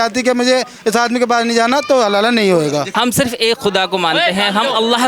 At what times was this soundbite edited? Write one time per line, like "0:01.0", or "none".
0:02.9